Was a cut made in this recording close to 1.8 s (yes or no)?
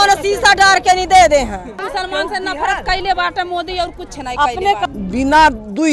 yes